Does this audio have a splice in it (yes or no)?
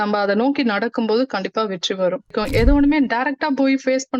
yes